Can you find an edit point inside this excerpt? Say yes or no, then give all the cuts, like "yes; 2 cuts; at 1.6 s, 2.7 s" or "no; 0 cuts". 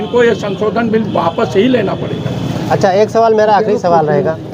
no; 0 cuts